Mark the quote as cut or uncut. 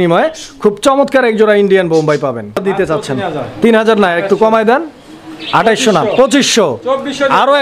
cut